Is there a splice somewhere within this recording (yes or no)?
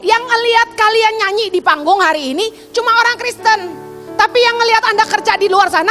no